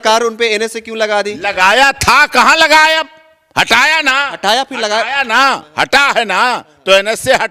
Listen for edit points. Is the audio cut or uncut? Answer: uncut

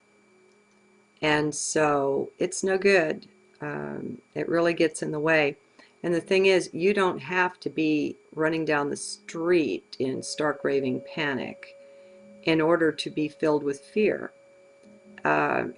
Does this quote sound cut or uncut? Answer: cut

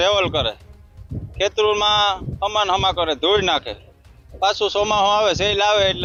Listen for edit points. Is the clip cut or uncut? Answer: uncut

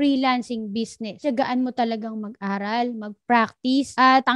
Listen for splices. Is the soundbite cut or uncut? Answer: cut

